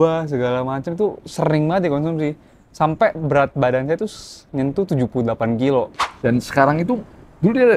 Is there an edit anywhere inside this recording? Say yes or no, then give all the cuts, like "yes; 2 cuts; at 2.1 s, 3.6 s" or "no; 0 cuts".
yes; 1 cut; at 6.0 s